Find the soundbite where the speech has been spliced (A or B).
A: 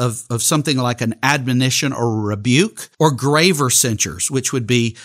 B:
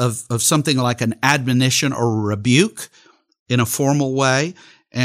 A